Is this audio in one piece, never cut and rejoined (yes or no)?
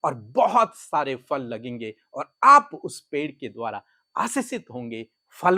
yes